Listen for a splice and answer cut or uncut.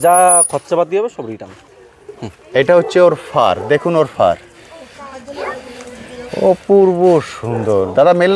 uncut